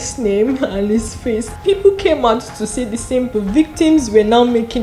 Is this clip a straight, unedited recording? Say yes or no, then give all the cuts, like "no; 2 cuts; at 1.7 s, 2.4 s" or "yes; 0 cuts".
no; 2 cuts; at 1.5 s, 3.3 s